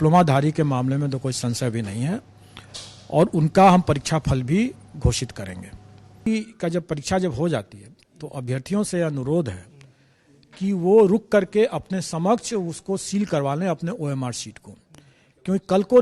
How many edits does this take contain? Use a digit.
1